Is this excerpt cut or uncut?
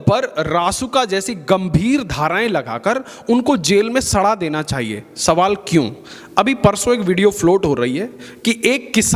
uncut